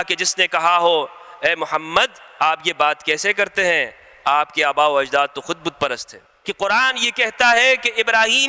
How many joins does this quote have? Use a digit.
1